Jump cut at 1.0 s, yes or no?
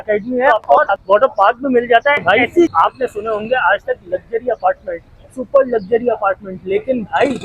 yes